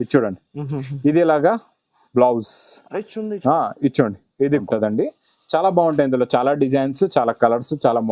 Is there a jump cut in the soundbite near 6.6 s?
no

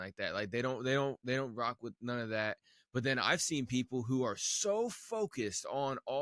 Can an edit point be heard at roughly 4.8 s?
no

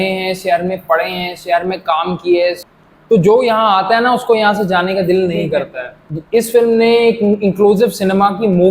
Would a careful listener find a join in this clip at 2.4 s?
yes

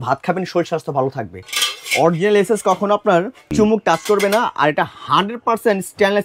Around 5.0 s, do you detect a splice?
no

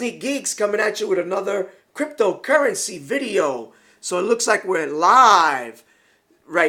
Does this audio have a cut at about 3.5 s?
no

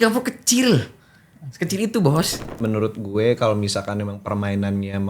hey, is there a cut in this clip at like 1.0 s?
no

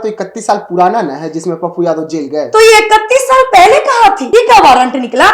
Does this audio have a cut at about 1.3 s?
no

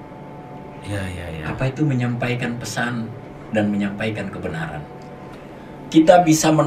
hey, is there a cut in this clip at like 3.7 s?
no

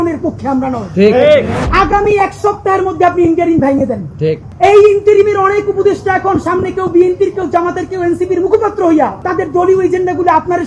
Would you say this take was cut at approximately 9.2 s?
yes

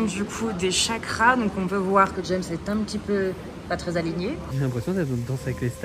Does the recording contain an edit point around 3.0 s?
no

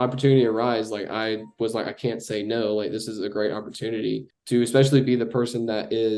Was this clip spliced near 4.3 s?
yes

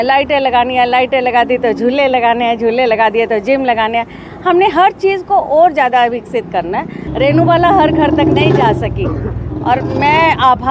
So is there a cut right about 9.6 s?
no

